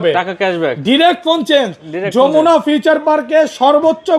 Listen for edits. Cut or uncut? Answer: uncut